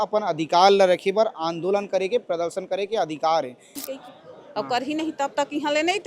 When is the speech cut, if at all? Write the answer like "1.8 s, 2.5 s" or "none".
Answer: 3.7 s